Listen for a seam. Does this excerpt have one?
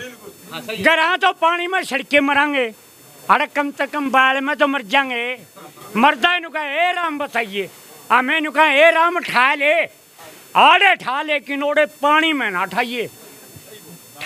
no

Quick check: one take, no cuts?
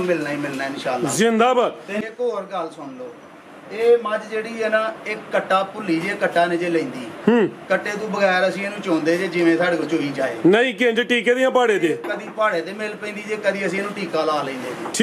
no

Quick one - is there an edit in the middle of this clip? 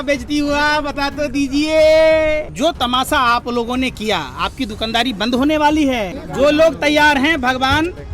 yes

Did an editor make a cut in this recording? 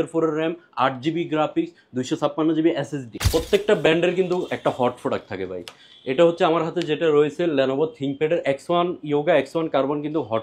yes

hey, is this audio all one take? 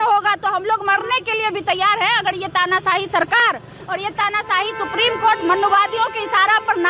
yes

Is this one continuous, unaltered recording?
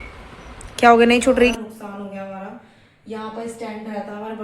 no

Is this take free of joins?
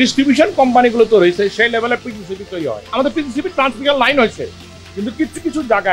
no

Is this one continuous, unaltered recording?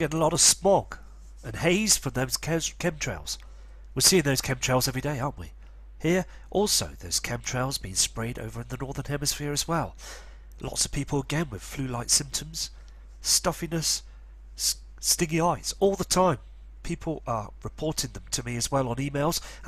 yes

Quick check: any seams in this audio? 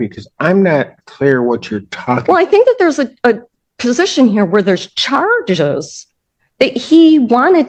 no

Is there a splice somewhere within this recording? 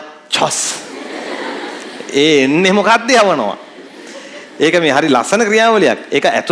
no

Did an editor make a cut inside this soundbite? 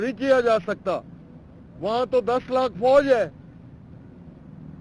no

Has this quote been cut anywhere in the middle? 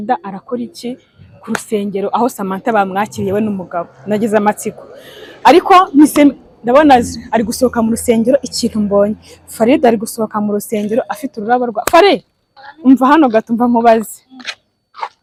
no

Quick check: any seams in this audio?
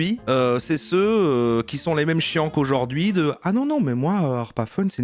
no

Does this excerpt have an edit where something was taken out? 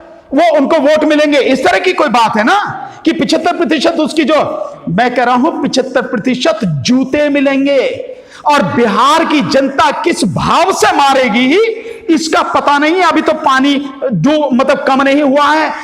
no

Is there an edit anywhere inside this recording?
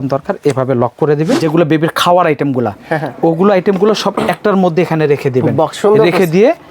yes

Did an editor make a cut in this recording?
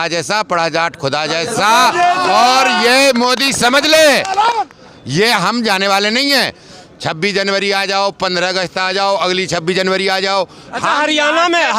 yes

